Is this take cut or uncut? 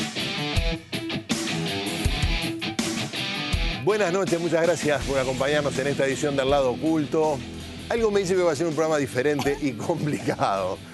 uncut